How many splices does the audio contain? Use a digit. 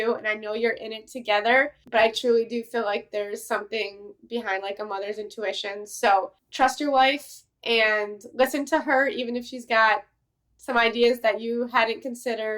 1